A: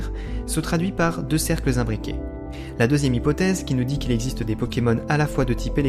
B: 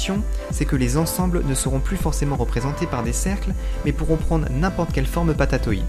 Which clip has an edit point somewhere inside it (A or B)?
A